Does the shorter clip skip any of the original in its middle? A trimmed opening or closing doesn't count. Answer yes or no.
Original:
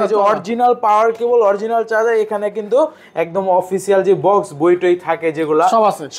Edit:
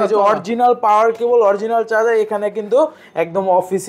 no